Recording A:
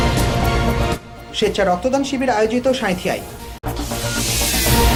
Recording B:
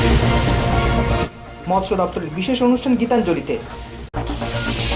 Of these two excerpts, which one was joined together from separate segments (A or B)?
B